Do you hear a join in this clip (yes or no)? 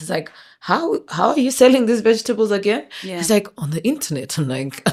no